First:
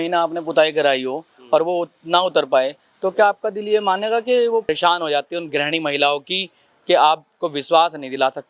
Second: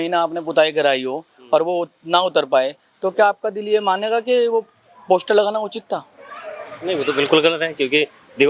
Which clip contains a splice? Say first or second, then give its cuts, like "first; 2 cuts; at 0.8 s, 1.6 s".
first; 1 cut; at 4.7 s